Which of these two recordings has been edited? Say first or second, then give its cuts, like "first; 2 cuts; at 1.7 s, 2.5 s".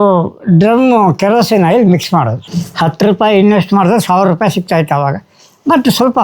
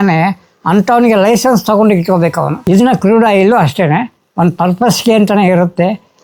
first; 1 cut; at 2.4 s